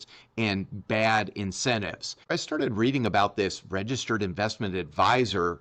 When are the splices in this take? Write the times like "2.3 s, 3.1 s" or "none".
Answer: 2.3 s